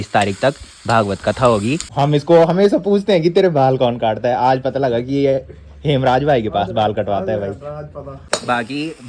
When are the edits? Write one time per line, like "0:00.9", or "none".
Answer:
0:01.9
0:08.3

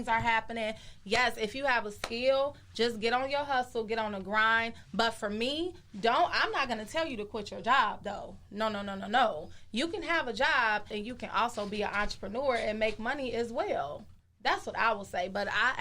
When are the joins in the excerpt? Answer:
0:10.9

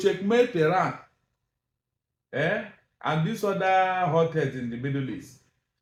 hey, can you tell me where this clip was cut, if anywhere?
none

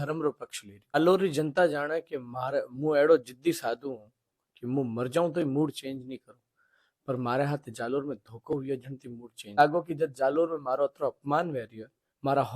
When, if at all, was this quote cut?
0:00.9
0:09.6

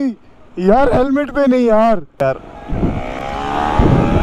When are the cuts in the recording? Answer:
0:02.2

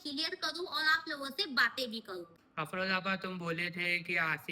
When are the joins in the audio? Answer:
0:02.3

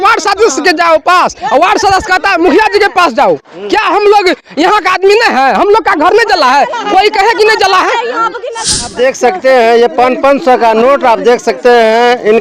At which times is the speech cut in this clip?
0:08.9

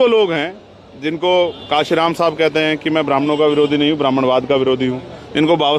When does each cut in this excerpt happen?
none

